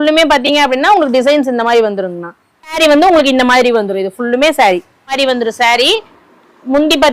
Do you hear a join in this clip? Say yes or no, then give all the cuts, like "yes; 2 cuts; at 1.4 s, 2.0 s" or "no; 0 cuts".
yes; 2 cuts; at 2.7 s, 5.1 s